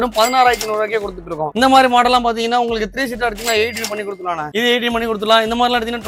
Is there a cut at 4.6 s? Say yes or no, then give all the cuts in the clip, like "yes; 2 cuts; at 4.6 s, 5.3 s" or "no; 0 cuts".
no; 0 cuts